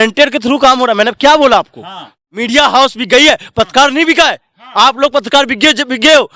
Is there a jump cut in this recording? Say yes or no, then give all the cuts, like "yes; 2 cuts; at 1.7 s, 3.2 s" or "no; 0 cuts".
yes; 1 cut; at 2.2 s